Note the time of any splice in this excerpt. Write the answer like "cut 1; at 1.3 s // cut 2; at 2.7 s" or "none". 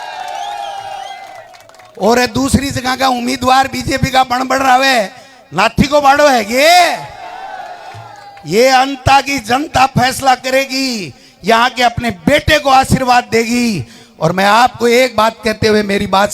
none